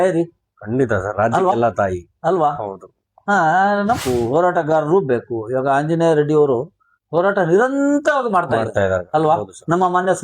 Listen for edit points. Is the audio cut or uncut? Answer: cut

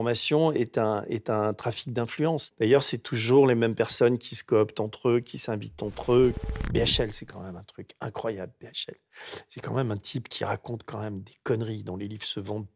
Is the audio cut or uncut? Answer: cut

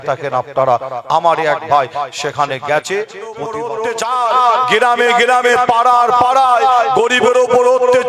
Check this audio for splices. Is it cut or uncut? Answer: cut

